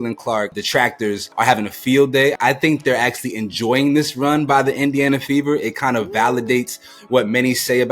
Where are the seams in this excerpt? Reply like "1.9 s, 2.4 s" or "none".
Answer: 1.2 s, 2.4 s